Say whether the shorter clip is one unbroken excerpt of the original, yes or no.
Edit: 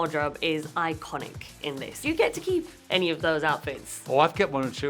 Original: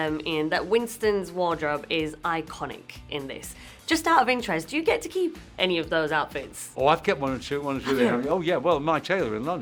no